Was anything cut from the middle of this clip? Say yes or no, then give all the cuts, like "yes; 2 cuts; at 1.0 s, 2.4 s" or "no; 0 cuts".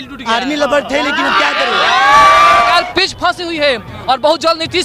yes; 1 cut; at 2.7 s